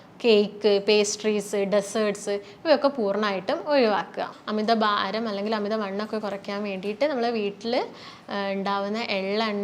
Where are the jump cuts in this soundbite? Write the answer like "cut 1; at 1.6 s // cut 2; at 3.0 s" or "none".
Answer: cut 1; at 4.3 s